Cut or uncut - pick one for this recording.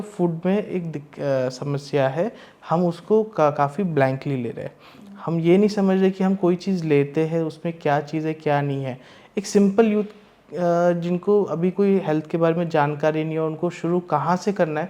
uncut